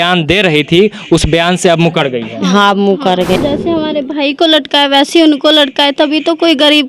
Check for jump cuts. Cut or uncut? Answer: cut